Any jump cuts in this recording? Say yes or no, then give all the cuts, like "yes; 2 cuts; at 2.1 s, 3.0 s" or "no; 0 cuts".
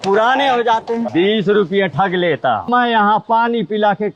yes; 2 cuts; at 1.1 s, 2.7 s